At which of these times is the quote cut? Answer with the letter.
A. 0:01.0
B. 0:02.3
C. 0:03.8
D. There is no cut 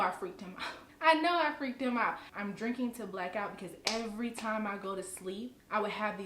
B